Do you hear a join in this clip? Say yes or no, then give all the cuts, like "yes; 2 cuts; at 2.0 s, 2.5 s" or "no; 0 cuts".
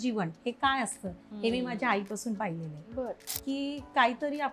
yes; 1 cut; at 3.3 s